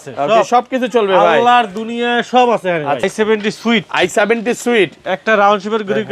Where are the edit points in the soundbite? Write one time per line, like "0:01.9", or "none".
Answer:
0:03.0